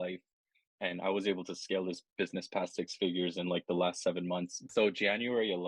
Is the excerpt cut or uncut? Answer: cut